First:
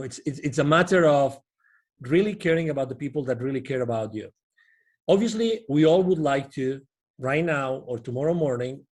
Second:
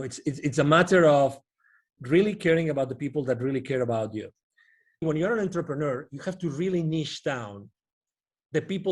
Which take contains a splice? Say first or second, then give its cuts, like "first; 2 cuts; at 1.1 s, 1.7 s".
second; 1 cut; at 5.0 s